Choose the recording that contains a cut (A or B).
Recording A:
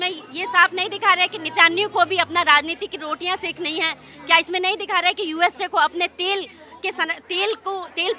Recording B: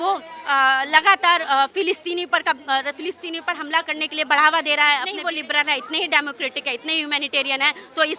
B